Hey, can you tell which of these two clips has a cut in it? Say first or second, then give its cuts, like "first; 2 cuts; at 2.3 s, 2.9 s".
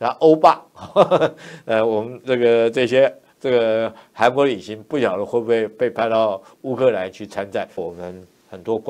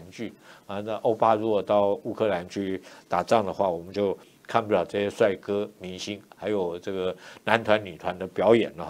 first; 1 cut; at 7.9 s